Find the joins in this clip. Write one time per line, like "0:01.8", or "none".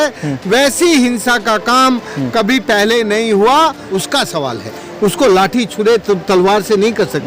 0:03.8